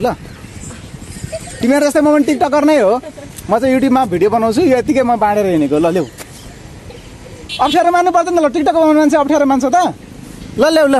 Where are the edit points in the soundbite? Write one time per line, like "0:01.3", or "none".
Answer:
none